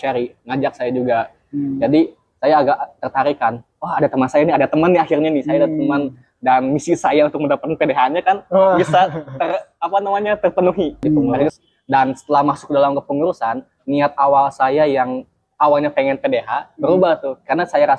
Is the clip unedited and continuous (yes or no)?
no